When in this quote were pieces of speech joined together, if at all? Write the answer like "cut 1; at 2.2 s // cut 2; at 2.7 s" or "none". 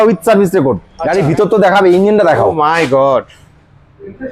cut 1; at 0.9 s

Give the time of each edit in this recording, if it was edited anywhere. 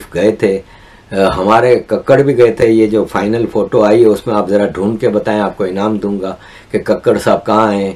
none

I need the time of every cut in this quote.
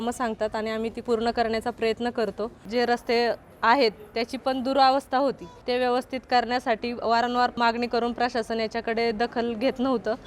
cut 1; at 1.0 s // cut 2; at 2.6 s // cut 3; at 5.5 s // cut 4; at 7.5 s

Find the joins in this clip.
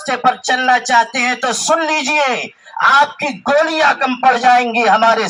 none

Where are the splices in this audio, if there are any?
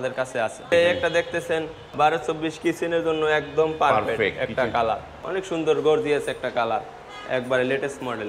cut 1; at 0.7 s // cut 2; at 1.9 s // cut 3; at 5.1 s

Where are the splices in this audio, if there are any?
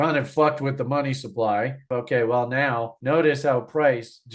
cut 1; at 1.8 s

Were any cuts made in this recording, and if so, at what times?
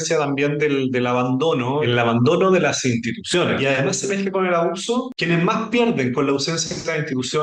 cut 1; at 1.9 s // cut 2; at 3.6 s // cut 3; at 5.1 s

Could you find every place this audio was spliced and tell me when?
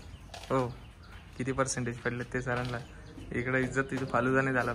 none

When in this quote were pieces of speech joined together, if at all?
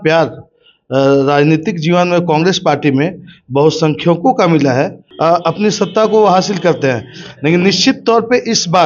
cut 1; at 5.0 s

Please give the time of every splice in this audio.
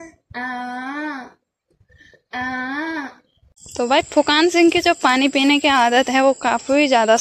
cut 1; at 3.7 s

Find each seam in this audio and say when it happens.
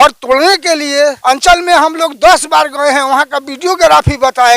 cut 1; at 1.2 s

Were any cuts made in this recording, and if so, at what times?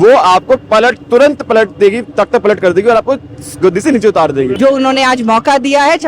cut 1; at 4.5 s

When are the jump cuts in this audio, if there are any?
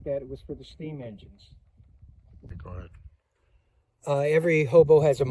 cut 1; at 2.4 s

